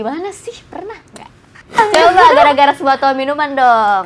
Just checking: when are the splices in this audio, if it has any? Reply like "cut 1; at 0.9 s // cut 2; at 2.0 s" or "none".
cut 1; at 1.8 s